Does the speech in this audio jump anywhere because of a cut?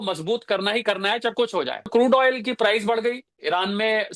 yes; 1 cut; at 1.9 s

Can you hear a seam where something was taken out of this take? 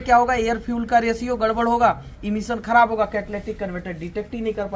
no; 0 cuts

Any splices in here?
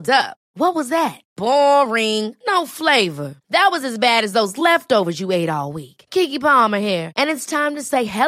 no; 0 cuts

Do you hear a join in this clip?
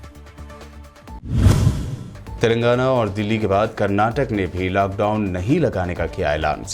yes; 1 cut; at 1.1 s

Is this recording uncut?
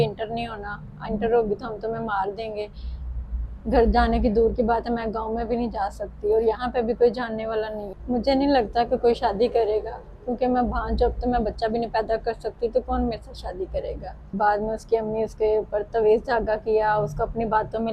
no; 2 cuts; at 7.9 s, 14.3 s

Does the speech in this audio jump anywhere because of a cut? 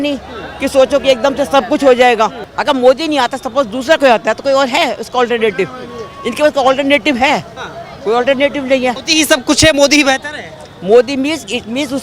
yes; 2 cuts; at 2.5 s, 9.0 s

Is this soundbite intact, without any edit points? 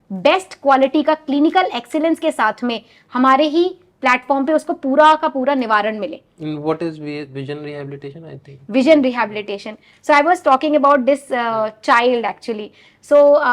yes; 0 cuts

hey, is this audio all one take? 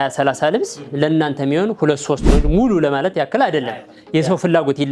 yes; 0 cuts

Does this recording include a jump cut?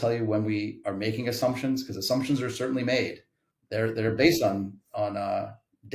yes; 1 cut; at 4.9 s

